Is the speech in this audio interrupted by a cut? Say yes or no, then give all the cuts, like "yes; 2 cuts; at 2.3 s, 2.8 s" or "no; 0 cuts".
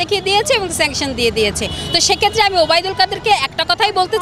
no; 0 cuts